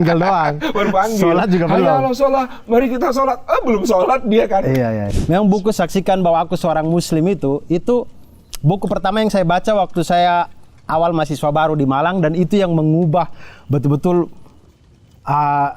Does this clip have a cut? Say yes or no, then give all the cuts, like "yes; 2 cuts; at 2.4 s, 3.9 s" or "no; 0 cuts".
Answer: yes; 1 cut; at 5.1 s